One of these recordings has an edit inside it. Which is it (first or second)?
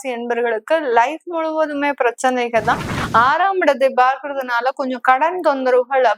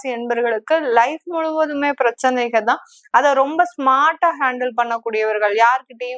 first